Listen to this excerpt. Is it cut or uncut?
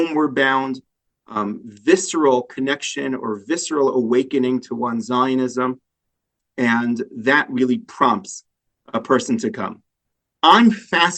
uncut